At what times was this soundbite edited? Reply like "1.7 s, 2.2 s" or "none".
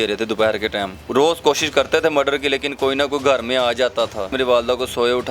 1.0 s, 4.3 s

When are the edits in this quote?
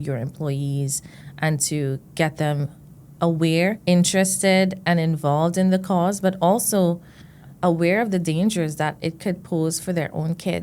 7.5 s

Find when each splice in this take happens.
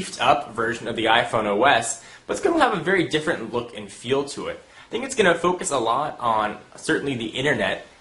4.2 s

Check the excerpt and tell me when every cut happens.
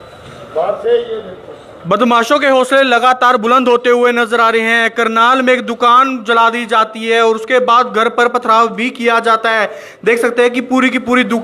none

